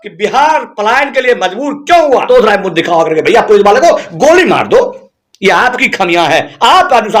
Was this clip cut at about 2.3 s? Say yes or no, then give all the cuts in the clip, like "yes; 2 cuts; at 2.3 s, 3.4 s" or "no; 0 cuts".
yes; 1 cut; at 2.3 s